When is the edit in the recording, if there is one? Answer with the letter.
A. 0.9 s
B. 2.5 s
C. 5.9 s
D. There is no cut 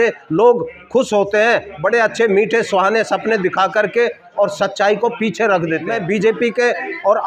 C